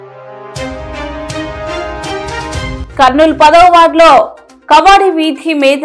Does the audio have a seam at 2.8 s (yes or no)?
yes